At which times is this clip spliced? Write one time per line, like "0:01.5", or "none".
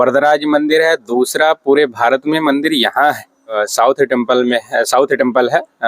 0:03.6